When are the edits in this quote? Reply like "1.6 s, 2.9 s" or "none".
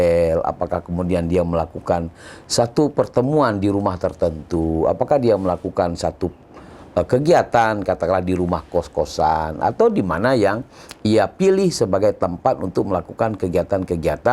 none